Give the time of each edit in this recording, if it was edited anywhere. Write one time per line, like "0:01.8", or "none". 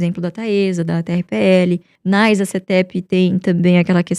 0:01.9